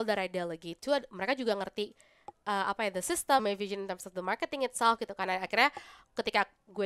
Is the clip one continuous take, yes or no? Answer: no